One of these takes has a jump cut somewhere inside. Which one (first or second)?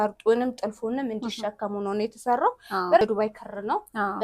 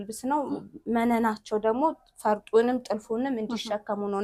first